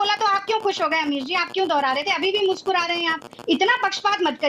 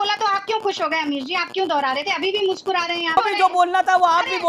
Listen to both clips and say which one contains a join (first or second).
second